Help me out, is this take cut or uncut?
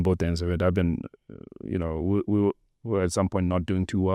uncut